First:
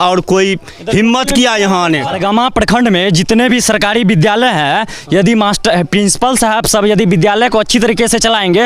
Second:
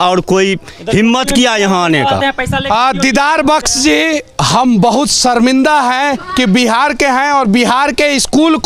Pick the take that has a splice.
first; 1 cut; at 2.1 s

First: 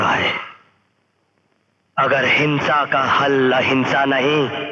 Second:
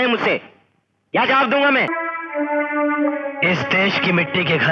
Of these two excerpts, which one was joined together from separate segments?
second; 1 cut; at 2.0 s

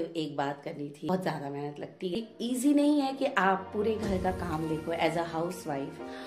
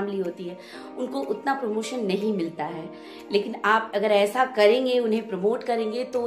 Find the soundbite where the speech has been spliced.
first; 2 cuts; at 1.0 s, 2.2 s

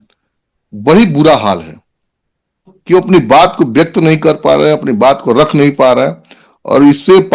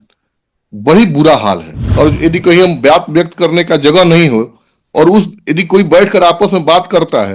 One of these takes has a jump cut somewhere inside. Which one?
second; 1 cut; at 1.8 s

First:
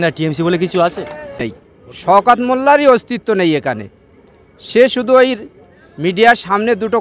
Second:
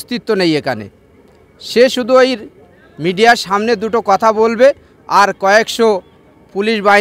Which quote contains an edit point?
first; 1 cut; at 1.6 s

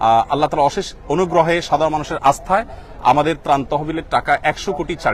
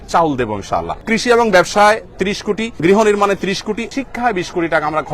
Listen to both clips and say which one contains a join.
second; 3 cuts; at 1.0 s, 2.8 s, 3.9 s

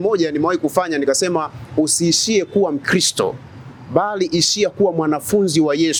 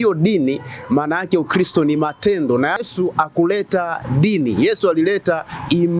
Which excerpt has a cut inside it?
second; 1 cut; at 2.8 s

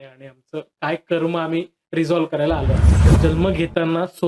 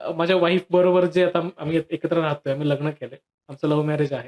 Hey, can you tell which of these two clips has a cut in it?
first; 1 cut; at 3.0 s

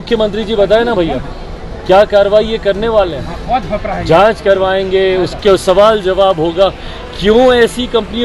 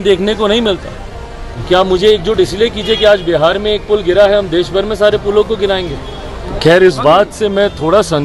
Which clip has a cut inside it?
second; 2 cuts; at 1.5 s, 6.5 s

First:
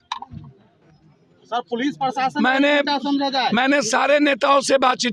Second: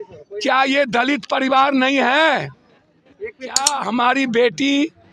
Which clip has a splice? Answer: second; 1 cut; at 3.7 s

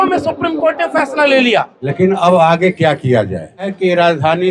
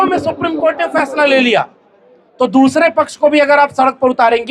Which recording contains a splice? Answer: first; 2 cuts; at 1.8 s, 3.7 s

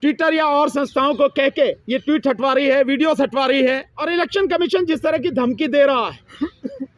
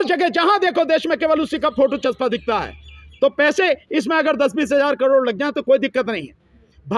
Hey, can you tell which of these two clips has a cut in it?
first; 1 cut; at 3.9 s

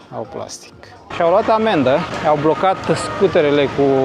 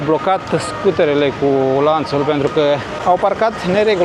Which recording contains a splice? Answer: first; 1 cut; at 1.1 s

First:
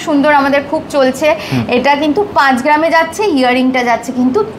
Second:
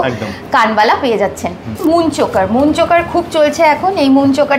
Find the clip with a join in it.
second; 1 cut; at 1.7 s

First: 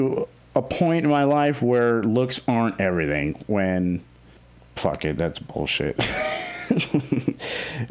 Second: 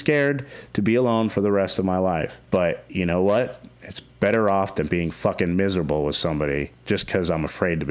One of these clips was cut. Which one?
second; 2 cuts; at 2.3 s, 6.7 s

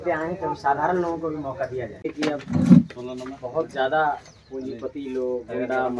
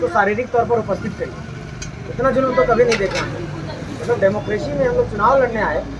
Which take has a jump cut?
first; 1 cut; at 2.1 s

